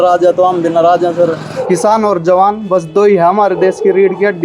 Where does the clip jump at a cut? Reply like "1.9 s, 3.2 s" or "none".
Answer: 1.5 s